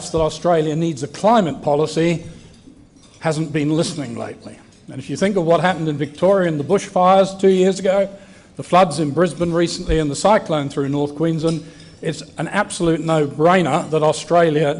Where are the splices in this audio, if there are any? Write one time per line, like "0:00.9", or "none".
0:11.1